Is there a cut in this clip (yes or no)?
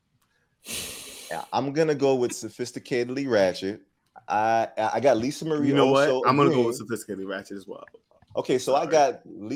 no